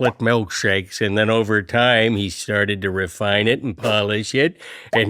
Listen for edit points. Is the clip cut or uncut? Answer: uncut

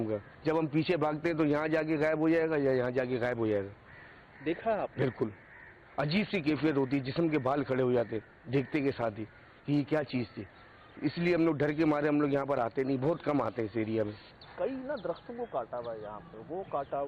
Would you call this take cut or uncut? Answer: uncut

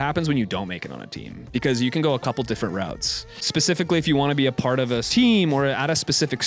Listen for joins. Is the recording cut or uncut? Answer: cut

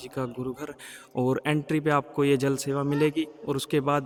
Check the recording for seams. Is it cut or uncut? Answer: uncut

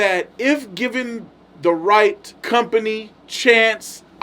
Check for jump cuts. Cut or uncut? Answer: cut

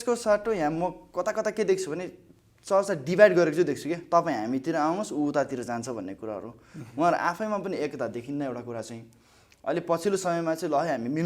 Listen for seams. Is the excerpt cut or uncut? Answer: uncut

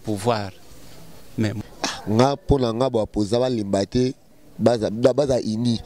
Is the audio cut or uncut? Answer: cut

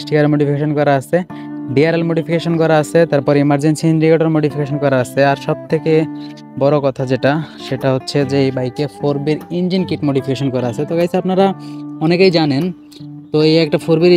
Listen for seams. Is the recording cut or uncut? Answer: uncut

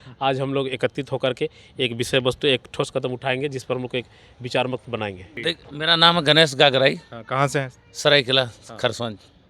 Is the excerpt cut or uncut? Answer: uncut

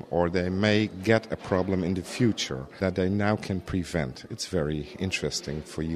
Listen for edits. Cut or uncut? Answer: cut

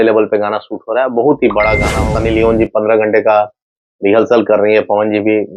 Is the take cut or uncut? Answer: cut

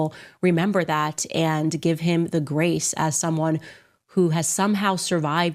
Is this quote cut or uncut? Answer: uncut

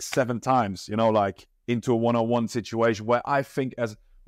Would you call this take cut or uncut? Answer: uncut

